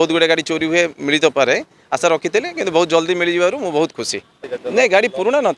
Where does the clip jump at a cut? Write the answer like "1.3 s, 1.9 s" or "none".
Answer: 4.4 s